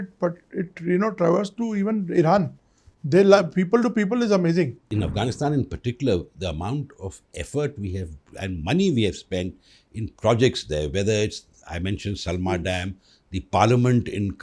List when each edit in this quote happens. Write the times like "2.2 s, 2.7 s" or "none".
4.8 s

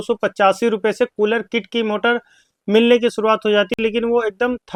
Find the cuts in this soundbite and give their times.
none

